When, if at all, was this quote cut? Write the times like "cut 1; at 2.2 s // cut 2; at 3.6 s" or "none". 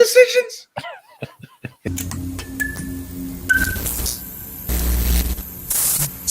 cut 1; at 1.9 s